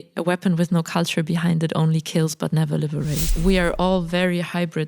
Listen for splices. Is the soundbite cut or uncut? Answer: cut